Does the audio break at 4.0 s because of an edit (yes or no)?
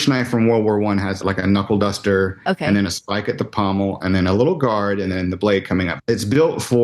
no